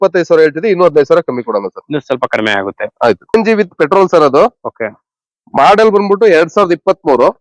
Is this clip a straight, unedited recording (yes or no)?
no